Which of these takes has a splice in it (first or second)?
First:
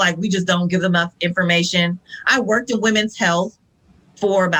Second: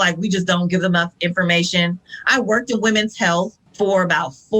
second